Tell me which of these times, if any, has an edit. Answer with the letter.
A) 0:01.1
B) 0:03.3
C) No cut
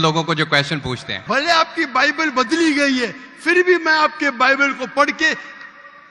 A